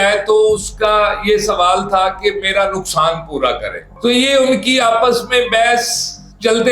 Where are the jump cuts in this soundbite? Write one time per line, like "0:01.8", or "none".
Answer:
0:03.9